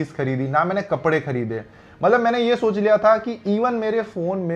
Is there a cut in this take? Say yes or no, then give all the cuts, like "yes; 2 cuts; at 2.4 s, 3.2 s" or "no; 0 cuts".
no; 0 cuts